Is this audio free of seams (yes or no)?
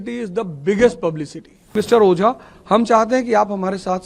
no